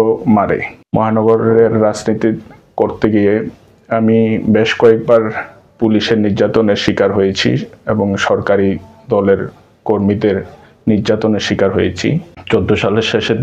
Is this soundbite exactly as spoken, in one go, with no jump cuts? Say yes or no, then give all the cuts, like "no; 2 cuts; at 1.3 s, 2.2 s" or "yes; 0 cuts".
no; 2 cuts; at 0.8 s, 12.3 s